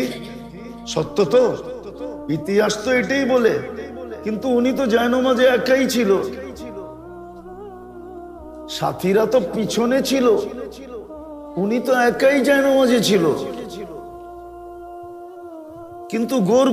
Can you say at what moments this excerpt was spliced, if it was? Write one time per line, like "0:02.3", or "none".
0:06.6
0:08.2